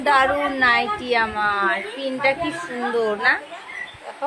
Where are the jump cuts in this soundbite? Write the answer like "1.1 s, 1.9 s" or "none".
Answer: none